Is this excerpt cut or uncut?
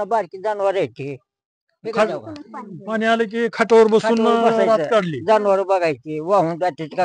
uncut